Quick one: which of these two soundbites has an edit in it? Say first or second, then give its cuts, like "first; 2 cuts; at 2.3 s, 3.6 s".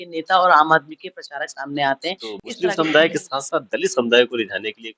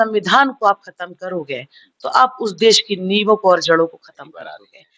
first; 1 cut; at 2.6 s